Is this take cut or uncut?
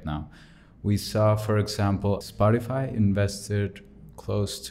cut